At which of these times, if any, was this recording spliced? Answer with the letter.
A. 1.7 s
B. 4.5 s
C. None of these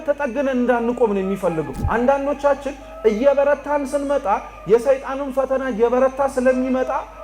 A